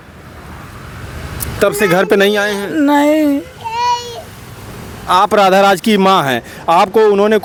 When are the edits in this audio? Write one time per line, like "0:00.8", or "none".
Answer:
none